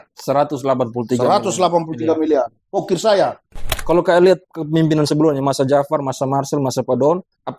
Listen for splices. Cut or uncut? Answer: cut